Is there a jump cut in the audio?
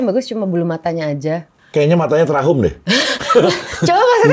yes; 1 cut; at 1.6 s

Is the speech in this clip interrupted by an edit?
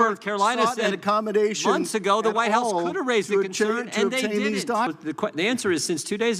yes; 1 cut; at 4.9 s

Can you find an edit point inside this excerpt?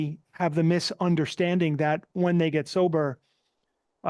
no; 0 cuts

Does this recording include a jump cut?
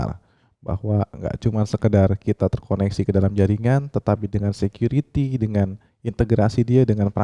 no; 0 cuts

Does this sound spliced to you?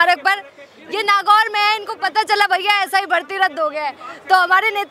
no; 0 cuts

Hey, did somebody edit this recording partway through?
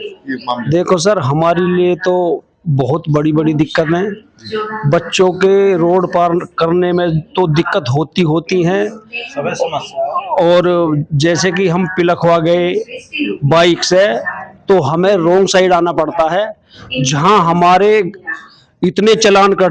no; 0 cuts

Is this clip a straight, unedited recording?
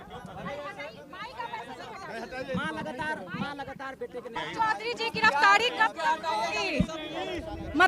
no; 1 cut; at 4.3 s

